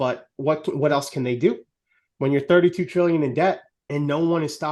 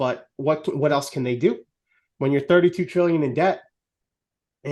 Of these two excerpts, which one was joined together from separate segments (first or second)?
first